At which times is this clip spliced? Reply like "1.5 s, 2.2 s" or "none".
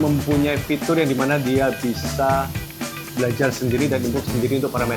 none